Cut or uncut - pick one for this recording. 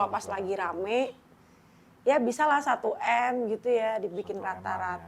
uncut